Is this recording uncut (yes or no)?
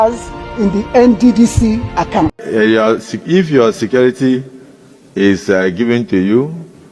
no